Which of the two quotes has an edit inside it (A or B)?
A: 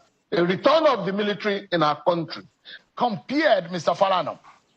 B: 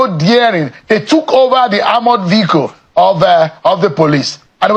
A